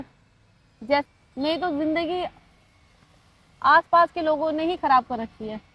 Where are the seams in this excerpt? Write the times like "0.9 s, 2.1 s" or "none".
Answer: 1.0 s